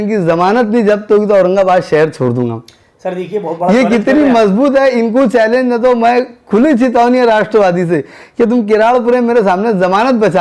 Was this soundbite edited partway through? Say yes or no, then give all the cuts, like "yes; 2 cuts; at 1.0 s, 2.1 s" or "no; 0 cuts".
no; 0 cuts